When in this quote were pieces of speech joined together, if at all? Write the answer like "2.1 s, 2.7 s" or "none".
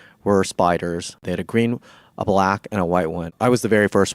1.2 s, 3.3 s